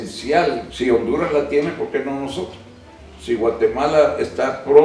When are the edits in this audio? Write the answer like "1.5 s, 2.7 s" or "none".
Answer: none

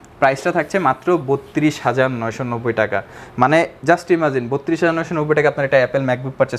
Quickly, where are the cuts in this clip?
none

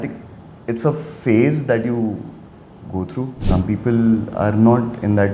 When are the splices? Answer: 3.4 s

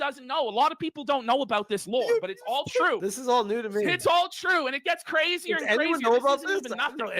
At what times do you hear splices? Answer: 3.0 s

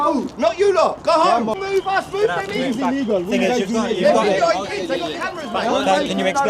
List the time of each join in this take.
1.5 s

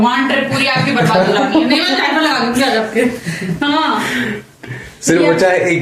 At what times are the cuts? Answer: none

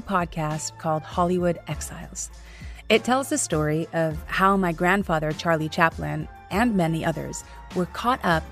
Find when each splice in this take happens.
none

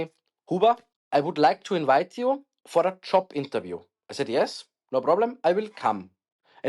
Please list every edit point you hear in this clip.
0.9 s

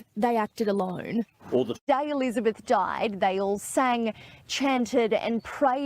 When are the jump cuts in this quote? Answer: 1.8 s

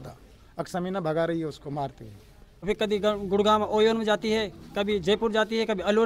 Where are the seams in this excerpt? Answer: 2.6 s

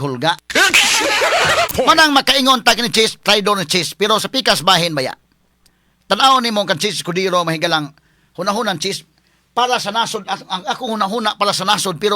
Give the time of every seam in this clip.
1.7 s

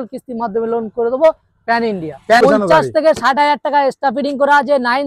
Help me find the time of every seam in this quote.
2.4 s

